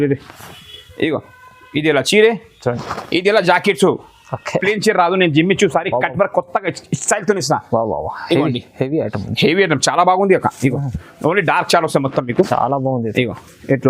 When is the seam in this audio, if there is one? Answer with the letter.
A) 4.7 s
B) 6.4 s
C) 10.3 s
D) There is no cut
A